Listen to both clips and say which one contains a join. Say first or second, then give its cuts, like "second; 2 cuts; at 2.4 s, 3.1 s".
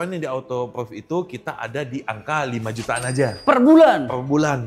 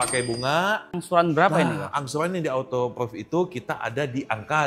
second; 1 cut; at 1.0 s